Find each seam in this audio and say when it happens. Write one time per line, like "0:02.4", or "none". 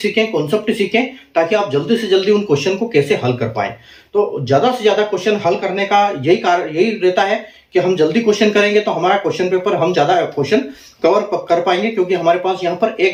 none

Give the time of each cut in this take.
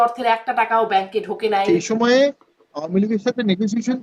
0:01.7

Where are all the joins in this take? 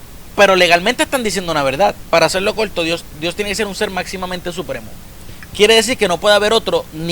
0:02.0

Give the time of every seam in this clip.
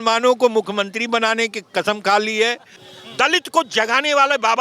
0:02.7

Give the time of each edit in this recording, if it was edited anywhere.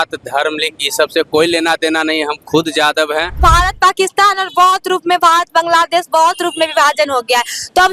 0:03.4

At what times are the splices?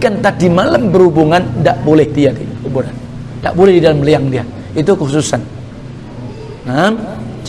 none

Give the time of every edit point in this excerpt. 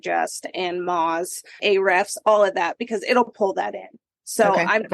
0:01.6

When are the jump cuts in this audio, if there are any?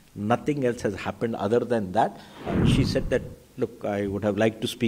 0:02.5

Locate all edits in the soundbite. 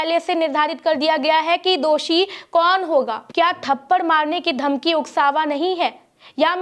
0:03.2

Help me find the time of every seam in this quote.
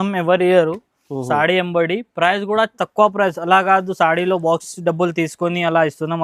none

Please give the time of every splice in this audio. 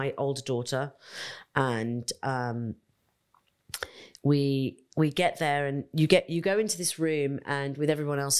none

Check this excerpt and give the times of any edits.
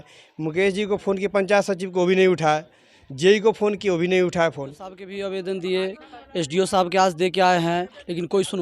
0:05.1

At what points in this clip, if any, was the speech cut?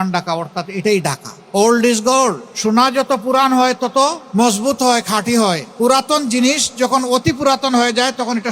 0:01.3
0:02.5
0:04.2
0:05.7

